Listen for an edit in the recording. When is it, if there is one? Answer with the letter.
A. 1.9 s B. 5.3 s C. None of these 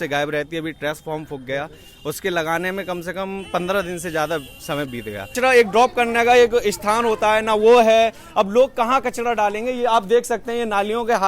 B